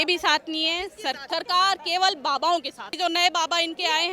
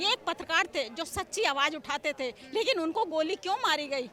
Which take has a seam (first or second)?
first